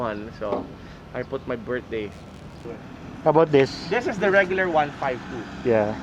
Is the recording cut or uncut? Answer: cut